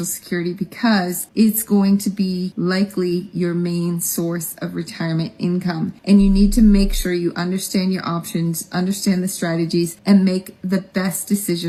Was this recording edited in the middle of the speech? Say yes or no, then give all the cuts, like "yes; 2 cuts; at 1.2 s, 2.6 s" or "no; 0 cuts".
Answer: no; 0 cuts